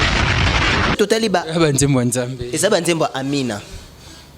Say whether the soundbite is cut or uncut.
cut